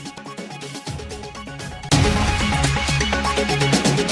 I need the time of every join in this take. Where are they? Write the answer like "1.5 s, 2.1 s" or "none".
1.9 s, 3.2 s